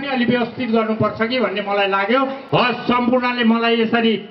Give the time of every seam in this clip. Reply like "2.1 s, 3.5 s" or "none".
none